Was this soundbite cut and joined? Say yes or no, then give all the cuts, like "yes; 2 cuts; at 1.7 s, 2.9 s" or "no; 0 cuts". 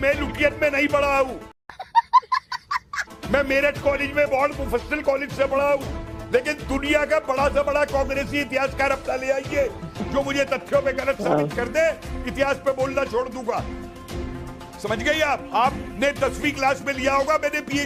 no; 0 cuts